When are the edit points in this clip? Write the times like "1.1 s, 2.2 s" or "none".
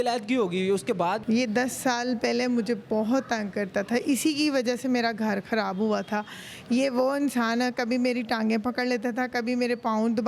1.2 s